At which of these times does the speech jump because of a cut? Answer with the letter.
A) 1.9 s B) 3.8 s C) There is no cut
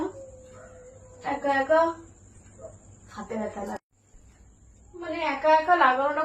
B